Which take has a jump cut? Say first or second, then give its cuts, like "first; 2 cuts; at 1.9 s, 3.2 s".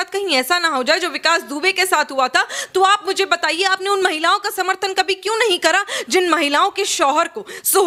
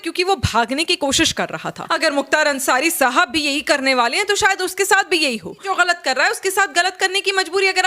second; 2 cuts; at 1.8 s, 5.7 s